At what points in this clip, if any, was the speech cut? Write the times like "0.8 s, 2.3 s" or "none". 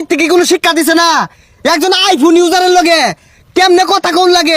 none